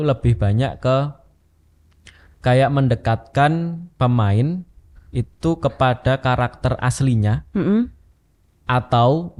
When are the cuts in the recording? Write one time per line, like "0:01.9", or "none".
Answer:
none